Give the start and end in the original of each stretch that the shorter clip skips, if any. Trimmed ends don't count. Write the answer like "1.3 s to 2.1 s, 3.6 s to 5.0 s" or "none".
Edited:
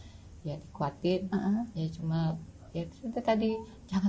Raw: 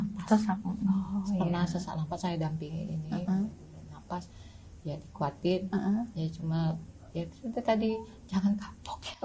none